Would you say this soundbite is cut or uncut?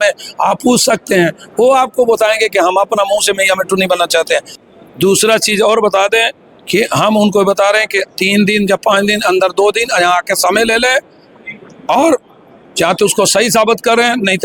cut